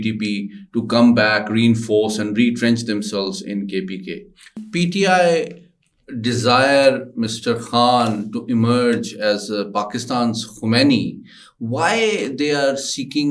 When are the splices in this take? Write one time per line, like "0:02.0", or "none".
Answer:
0:04.5